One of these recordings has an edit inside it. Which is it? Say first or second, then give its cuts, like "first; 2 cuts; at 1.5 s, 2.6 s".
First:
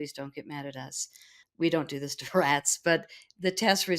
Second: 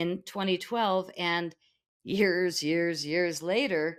first; 1 cut; at 1.4 s